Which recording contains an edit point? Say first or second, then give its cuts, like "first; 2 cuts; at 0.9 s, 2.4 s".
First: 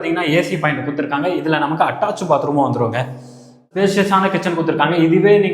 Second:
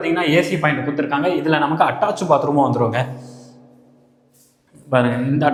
first; 1 cut; at 3.7 s